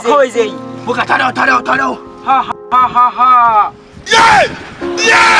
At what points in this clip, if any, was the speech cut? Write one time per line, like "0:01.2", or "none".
none